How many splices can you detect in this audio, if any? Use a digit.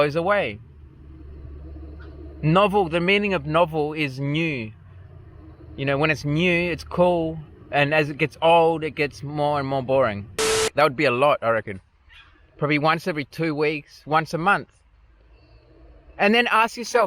1